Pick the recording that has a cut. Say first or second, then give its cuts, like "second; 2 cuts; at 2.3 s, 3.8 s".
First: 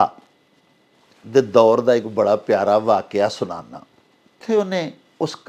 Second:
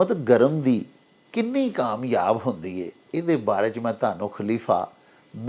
first; 1 cut; at 4.4 s